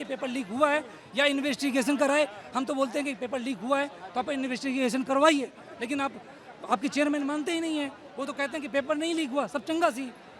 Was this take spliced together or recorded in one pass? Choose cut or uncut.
uncut